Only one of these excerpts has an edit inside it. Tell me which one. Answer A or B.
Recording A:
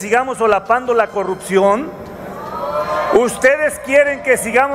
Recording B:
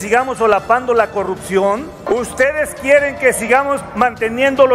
B